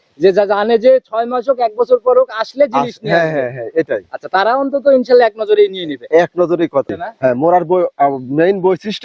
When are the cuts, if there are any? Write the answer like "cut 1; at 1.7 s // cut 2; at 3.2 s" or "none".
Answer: cut 1; at 7.3 s